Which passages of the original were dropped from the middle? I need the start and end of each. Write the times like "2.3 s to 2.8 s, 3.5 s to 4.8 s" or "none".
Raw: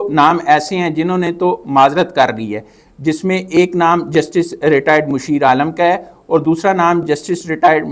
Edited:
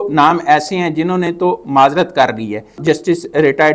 2.8 s to 4.1 s